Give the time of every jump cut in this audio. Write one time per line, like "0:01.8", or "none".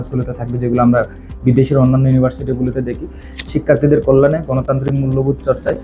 0:03.3